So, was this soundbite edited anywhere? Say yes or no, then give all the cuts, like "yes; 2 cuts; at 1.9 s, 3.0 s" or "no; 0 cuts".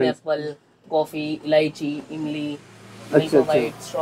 no; 0 cuts